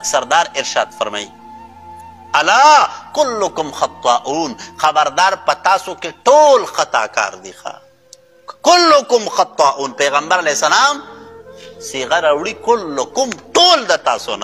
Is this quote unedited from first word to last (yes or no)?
yes